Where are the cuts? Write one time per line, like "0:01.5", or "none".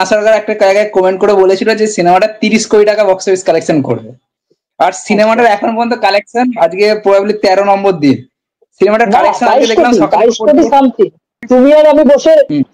0:11.4

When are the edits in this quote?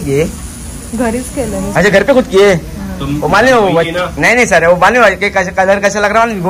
0:01.7

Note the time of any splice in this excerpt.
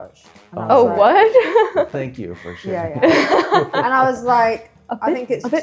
none

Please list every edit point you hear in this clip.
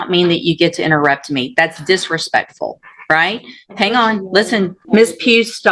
0:04.8

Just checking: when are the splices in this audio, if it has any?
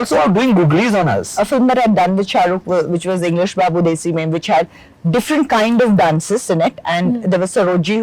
0:01.3

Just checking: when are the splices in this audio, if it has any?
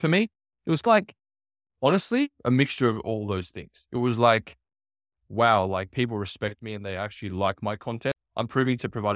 0:08.2

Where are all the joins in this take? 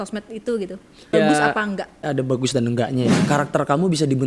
0:01.1
0:02.0
0:03.2

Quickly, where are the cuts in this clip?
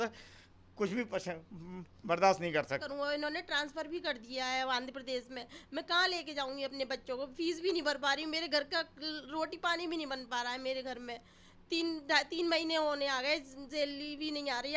0:02.9

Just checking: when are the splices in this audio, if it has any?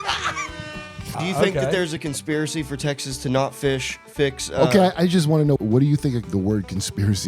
0:01.1
0:05.8

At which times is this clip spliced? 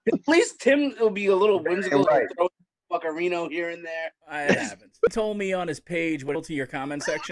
0:06.3

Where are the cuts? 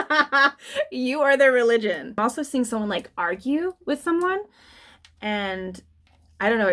0:02.2

